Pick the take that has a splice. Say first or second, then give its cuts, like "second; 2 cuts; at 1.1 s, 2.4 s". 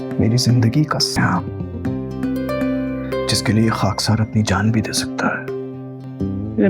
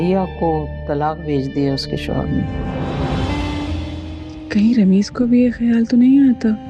first; 1 cut; at 1.2 s